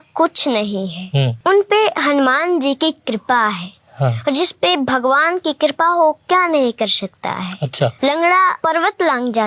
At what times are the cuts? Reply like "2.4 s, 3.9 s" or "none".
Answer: 1.3 s, 7.9 s, 8.6 s

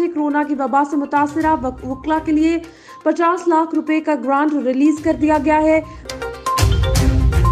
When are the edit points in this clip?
6.0 s

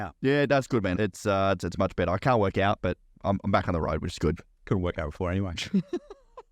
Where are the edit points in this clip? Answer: 0.9 s, 3.1 s

